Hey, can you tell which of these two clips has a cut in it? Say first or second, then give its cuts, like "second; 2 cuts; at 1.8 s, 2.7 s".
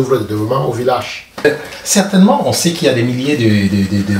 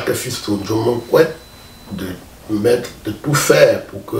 first; 1 cut; at 1.4 s